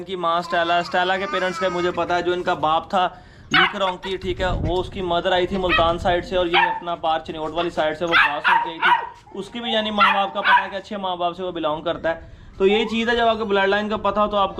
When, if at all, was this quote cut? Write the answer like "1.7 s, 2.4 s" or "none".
none